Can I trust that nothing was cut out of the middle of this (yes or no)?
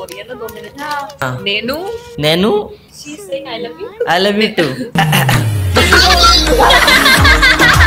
no